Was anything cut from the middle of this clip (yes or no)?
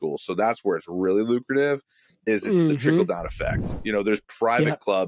no